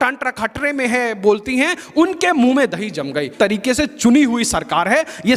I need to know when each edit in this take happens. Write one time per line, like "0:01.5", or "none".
0:03.3